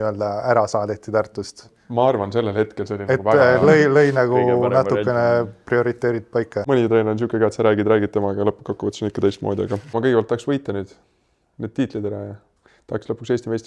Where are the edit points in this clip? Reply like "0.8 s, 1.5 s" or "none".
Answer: 6.7 s, 9.9 s